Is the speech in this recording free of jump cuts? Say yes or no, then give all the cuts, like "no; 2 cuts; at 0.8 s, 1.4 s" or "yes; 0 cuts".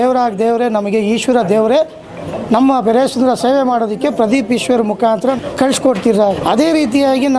no; 2 cuts; at 5.4 s, 6.4 s